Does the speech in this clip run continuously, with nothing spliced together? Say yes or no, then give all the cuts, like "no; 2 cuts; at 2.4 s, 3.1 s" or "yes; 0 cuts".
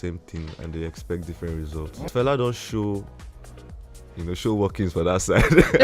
no; 1 cut; at 2.1 s